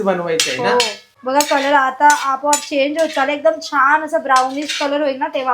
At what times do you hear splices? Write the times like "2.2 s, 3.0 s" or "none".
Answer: 1.1 s